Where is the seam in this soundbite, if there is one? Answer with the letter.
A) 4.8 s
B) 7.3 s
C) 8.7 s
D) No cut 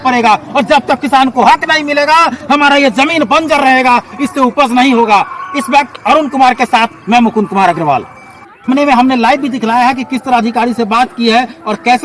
C